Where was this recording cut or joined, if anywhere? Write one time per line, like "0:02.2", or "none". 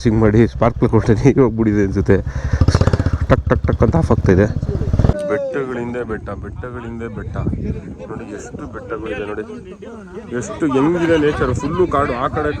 0:05.2